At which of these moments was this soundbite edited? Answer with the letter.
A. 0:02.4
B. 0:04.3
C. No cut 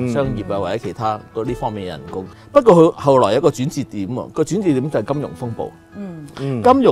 A